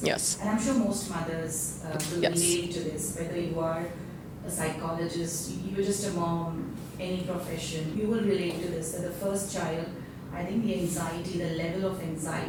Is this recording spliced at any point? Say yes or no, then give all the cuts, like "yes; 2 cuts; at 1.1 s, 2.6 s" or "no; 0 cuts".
no; 0 cuts